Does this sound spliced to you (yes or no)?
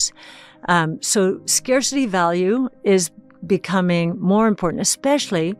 no